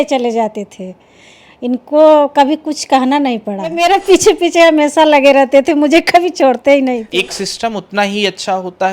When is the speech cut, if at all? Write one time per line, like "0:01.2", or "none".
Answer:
0:03.6
0:07.1